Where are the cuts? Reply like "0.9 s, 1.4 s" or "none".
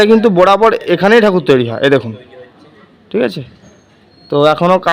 none